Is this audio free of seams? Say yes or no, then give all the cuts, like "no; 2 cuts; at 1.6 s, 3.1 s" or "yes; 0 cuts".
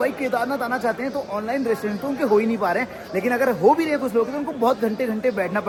yes; 0 cuts